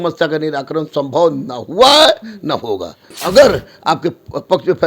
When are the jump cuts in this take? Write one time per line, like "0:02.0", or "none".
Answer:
0:03.1